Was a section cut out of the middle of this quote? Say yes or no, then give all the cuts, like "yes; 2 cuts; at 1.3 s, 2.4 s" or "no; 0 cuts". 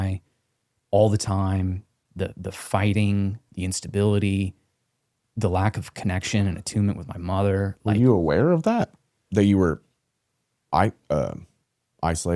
no; 0 cuts